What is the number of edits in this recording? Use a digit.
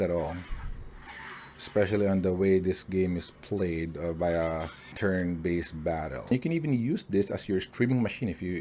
2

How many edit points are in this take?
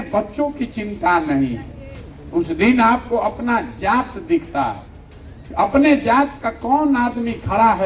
0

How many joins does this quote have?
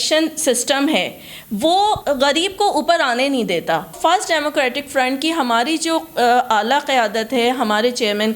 2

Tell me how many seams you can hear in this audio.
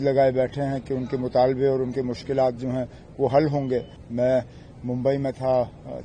1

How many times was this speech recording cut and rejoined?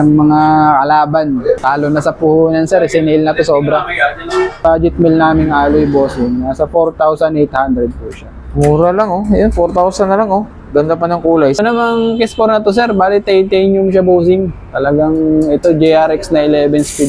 3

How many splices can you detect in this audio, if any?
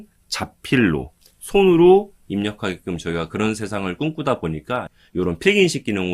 1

